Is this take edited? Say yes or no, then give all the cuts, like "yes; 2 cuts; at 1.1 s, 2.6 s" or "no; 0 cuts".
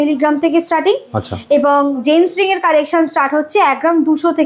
no; 0 cuts